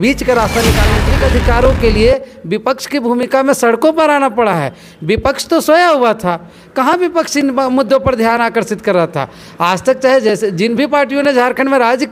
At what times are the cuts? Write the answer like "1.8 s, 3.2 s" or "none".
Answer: 1.1 s